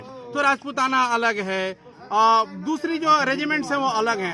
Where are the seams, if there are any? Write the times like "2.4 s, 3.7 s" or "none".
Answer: none